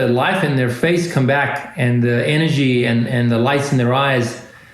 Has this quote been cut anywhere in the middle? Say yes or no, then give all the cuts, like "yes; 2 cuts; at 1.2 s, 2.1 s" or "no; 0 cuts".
no; 0 cuts